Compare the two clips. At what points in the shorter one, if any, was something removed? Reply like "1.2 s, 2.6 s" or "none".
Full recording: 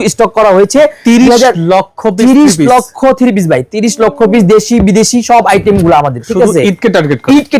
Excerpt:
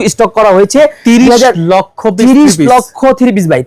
none